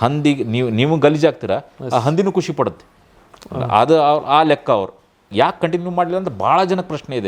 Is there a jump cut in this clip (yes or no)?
yes